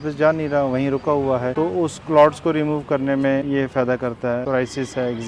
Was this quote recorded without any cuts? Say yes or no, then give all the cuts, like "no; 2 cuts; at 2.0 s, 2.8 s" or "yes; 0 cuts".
no; 2 cuts; at 3.4 s, 4.4 s